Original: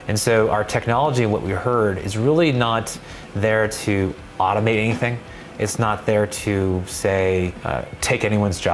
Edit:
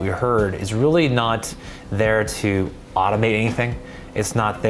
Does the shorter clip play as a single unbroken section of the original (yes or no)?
yes